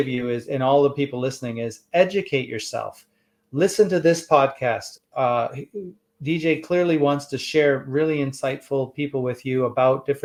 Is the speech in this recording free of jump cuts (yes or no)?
yes